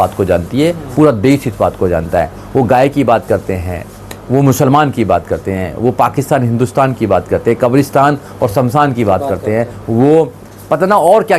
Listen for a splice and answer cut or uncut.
uncut